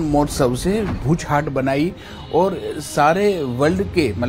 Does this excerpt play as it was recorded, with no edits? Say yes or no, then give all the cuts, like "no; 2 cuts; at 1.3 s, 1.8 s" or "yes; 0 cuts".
no; 1 cut; at 1.0 s